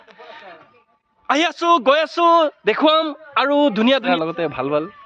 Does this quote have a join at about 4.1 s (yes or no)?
yes